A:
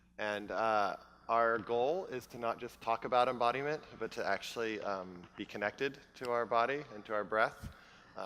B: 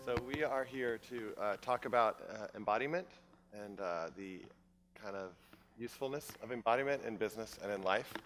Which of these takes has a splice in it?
A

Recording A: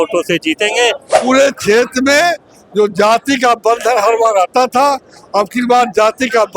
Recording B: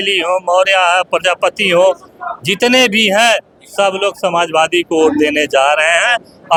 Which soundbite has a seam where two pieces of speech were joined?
A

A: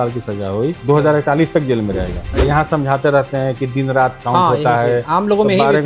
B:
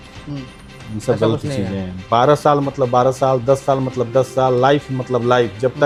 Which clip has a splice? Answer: A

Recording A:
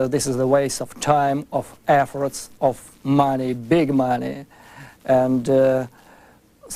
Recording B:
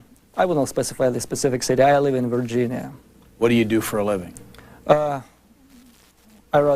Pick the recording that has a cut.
B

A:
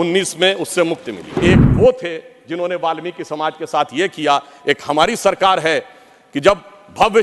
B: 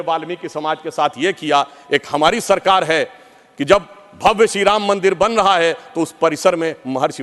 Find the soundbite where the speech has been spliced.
A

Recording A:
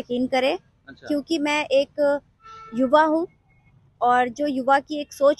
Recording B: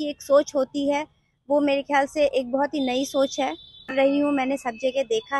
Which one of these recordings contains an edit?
B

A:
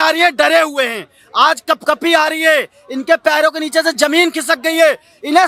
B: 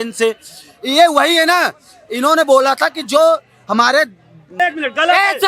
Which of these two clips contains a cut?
B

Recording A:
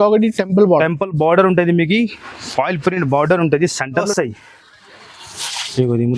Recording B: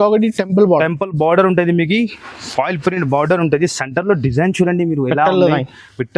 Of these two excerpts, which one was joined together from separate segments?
A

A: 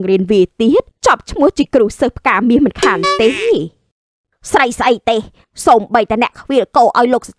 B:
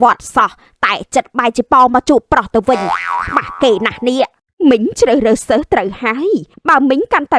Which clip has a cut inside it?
B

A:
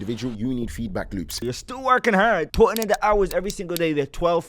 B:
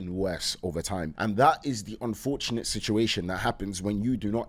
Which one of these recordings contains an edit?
A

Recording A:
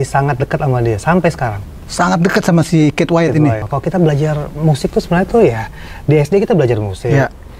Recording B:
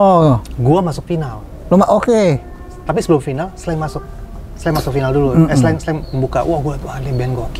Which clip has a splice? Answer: A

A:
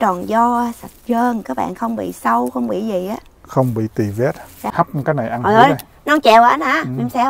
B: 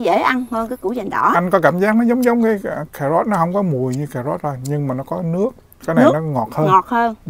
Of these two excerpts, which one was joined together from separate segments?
A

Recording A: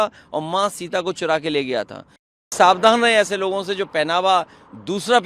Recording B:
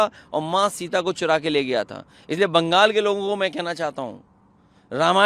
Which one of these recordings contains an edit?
A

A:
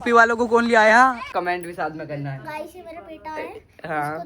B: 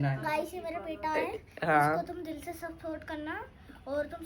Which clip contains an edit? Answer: A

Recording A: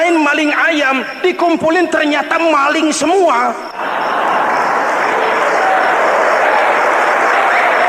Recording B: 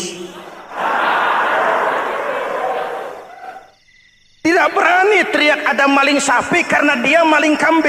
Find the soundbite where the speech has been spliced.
A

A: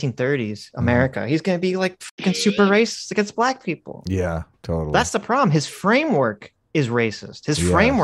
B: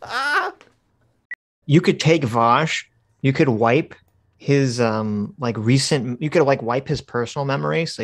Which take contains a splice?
B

